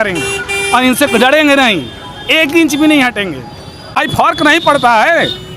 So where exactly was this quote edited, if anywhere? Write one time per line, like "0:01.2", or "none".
0:04.0